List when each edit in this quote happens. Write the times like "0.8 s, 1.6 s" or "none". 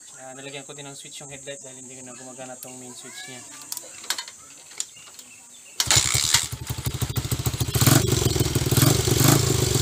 3.8 s